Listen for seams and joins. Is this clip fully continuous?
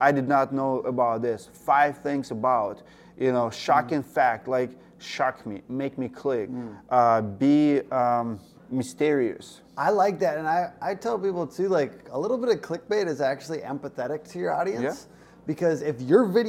yes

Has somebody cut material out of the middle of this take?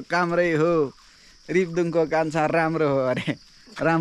no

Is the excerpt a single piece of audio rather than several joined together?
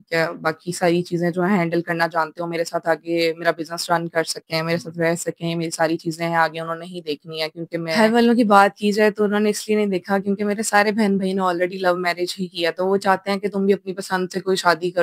no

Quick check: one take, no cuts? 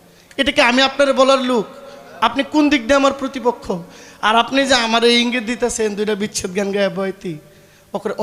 yes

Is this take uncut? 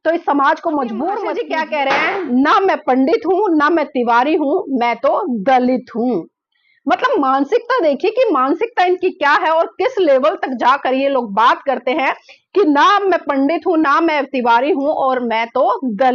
no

